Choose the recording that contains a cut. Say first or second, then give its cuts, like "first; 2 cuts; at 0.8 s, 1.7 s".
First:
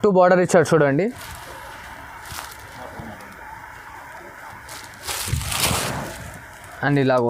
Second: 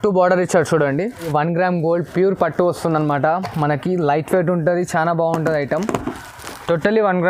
second; 1 cut; at 1.3 s